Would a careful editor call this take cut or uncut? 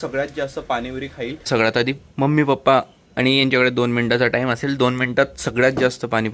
cut